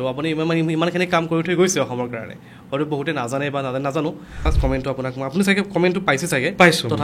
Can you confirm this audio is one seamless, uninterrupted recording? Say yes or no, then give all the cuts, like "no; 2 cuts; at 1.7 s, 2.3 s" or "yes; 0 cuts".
no; 1 cut; at 4.5 s